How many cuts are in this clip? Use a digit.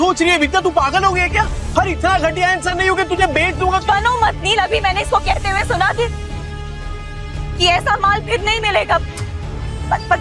1